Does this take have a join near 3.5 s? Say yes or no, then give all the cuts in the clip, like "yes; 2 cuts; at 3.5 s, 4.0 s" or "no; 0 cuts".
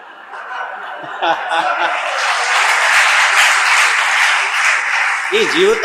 no; 0 cuts